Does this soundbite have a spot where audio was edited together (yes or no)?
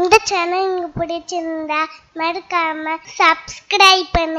yes